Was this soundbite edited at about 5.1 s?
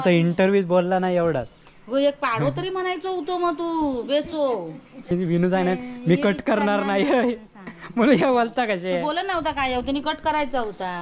yes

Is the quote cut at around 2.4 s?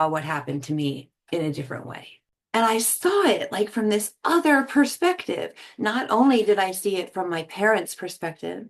yes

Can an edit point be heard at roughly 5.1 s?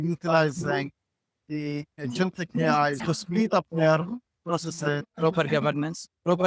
yes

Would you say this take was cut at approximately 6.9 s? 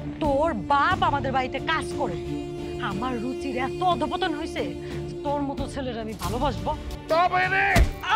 yes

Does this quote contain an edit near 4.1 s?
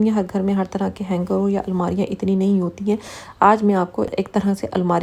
yes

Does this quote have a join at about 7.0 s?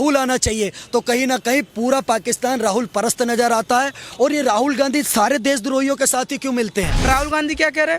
yes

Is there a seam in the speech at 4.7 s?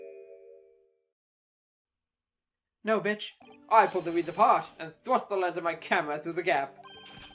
no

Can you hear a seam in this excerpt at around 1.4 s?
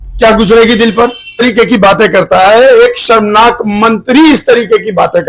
yes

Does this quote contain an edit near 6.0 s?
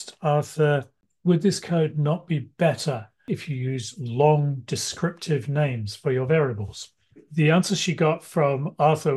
no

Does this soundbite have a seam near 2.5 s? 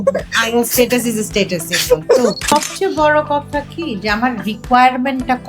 yes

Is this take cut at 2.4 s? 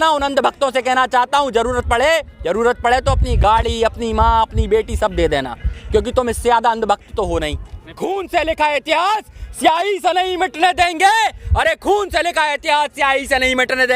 no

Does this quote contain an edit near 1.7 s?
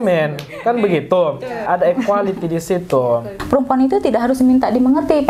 yes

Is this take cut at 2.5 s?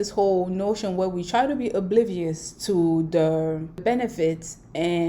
no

